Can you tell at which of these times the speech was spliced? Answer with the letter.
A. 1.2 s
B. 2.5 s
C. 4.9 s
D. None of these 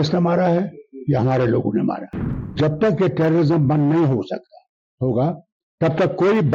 B